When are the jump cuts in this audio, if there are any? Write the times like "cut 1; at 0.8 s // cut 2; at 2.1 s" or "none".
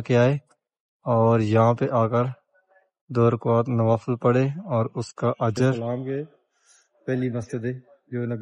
cut 1; at 5.8 s